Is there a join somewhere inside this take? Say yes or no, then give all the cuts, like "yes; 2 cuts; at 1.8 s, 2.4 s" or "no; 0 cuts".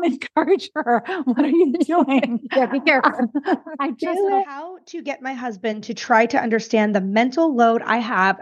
yes; 1 cut; at 4.5 s